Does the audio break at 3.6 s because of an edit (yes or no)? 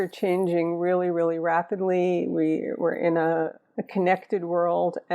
yes